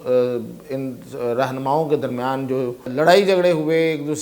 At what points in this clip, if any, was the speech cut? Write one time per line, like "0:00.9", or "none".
0:02.9